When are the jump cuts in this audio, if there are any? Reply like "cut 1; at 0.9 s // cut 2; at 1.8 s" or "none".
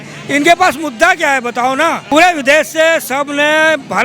cut 1; at 2.0 s